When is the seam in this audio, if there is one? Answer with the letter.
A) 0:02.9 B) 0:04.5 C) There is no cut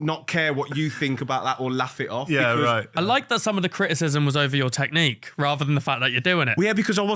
A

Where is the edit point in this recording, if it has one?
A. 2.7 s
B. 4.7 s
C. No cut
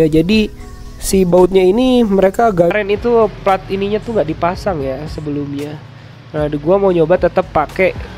A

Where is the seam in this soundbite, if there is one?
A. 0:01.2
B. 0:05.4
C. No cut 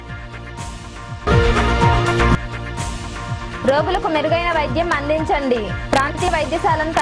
A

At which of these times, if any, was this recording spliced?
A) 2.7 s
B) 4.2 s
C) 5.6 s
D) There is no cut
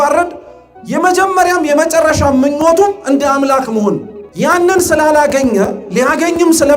B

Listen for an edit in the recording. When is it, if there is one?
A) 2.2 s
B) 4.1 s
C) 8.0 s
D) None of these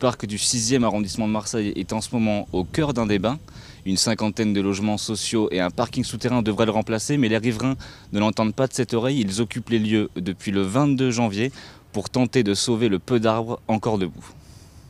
A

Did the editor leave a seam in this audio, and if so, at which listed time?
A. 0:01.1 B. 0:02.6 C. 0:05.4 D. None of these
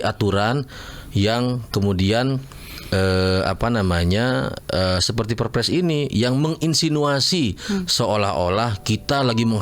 D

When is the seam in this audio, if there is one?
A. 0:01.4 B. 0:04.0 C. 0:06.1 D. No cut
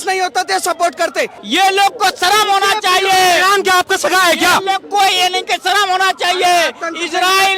A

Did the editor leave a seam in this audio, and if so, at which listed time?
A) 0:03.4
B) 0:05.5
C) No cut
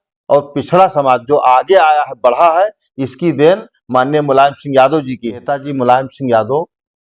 B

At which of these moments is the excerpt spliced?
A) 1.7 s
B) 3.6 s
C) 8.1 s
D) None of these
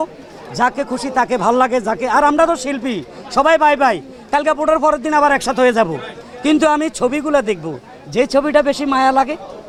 D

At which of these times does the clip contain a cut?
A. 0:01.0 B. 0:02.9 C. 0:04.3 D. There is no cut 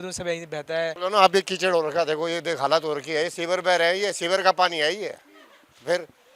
A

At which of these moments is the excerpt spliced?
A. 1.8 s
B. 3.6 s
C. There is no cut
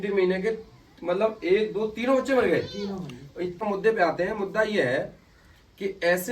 B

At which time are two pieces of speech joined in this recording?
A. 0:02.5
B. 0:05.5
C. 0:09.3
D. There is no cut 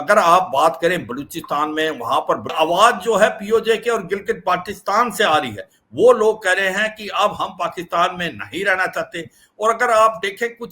A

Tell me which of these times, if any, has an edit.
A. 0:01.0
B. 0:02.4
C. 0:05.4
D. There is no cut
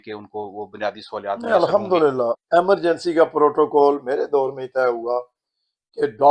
B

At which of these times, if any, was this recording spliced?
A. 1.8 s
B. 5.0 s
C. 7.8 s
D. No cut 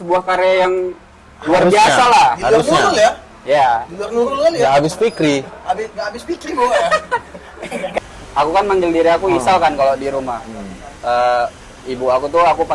C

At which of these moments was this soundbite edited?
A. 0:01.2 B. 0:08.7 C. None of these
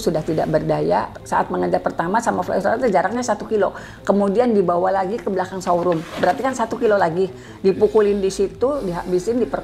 A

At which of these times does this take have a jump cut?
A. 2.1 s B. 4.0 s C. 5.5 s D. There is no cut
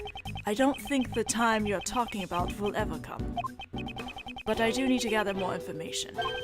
B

